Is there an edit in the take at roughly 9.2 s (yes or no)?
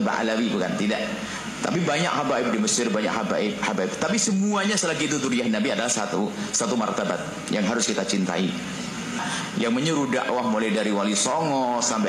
yes